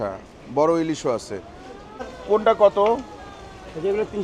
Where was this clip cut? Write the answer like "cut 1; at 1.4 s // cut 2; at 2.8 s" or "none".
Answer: cut 1; at 2.1 s